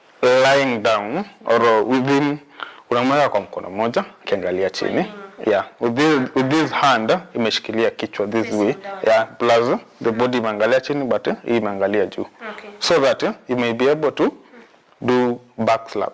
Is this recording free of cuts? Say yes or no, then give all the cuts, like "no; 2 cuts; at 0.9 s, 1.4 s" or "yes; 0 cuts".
yes; 0 cuts